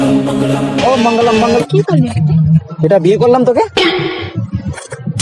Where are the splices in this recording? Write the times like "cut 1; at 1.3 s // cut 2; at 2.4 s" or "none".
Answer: cut 1; at 1.6 s